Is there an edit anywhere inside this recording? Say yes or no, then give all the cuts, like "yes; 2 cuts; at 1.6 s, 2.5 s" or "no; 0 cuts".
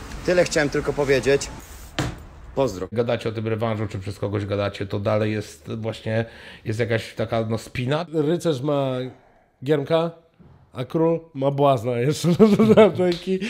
yes; 2 cuts; at 2.9 s, 8.1 s